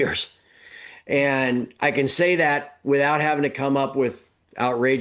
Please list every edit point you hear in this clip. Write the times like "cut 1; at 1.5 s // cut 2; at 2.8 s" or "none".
none